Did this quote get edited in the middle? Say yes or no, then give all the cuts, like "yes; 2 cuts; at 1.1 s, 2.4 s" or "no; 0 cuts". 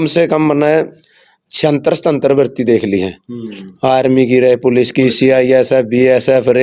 no; 0 cuts